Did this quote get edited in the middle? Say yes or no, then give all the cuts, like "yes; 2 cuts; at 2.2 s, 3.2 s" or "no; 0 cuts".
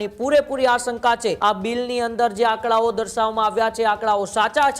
yes; 1 cut; at 1.4 s